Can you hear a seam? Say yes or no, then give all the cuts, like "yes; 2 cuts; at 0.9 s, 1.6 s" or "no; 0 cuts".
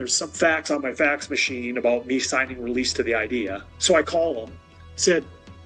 yes; 1 cut; at 3.7 s